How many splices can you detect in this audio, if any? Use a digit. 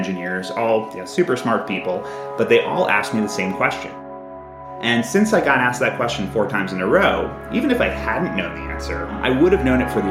2